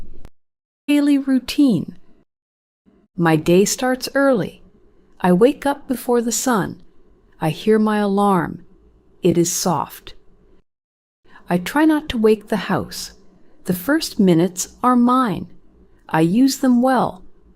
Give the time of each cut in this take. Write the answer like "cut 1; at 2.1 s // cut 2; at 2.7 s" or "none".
cut 1; at 0.9 s